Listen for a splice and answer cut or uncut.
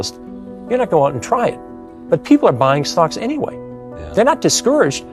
uncut